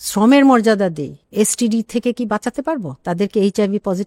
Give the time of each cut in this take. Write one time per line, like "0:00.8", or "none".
none